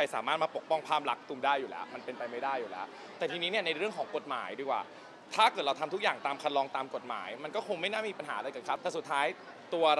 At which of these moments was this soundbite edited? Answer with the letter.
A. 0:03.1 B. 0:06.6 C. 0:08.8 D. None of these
C